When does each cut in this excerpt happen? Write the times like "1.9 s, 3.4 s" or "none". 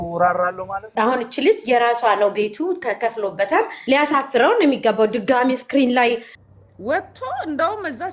0.9 s, 6.3 s